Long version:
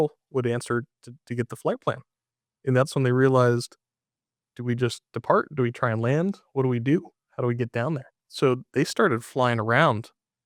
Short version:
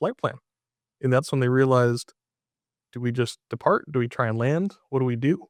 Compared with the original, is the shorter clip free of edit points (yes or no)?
yes